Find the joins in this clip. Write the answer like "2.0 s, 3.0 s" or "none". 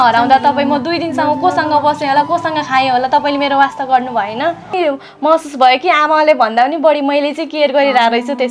4.7 s